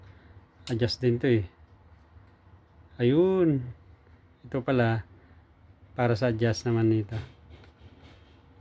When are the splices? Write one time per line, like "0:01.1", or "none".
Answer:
none